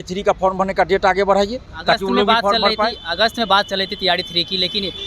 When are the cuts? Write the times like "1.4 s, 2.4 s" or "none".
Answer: none